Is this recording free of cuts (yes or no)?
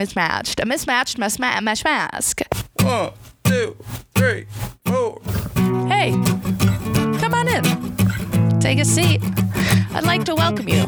no